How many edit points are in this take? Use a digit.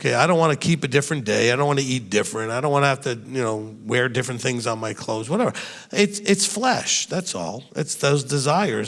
0